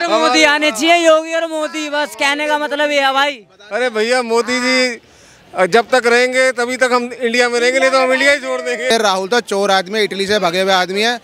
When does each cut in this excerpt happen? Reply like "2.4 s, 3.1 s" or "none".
8.9 s